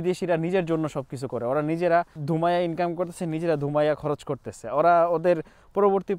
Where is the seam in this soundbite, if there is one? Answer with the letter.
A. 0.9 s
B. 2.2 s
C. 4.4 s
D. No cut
B